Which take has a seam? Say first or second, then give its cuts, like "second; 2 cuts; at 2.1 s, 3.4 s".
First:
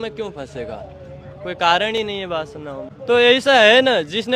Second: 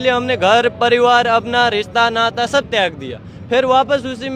first; 1 cut; at 2.9 s